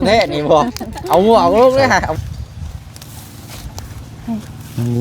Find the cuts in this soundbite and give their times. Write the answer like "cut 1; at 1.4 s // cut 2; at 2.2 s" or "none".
cut 1; at 2.1 s